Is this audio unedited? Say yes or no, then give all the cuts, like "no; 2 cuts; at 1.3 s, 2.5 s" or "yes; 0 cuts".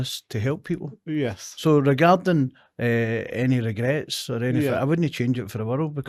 yes; 0 cuts